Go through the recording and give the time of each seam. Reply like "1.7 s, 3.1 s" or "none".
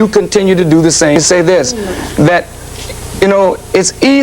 1.2 s